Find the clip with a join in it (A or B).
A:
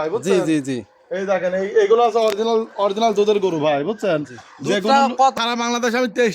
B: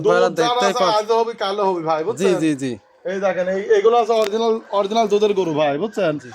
A